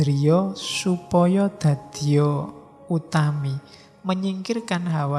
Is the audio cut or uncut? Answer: uncut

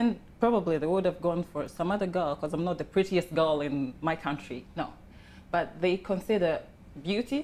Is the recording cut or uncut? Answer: uncut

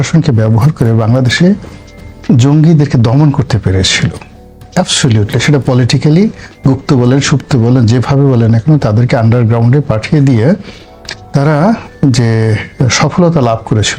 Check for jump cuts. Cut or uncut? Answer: uncut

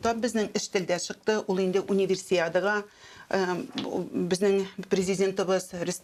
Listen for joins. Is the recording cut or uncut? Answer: uncut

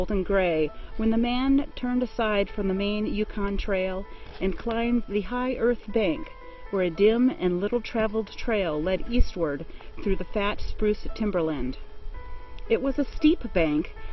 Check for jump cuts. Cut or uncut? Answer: cut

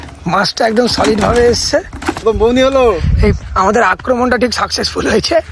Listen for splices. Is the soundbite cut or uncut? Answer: cut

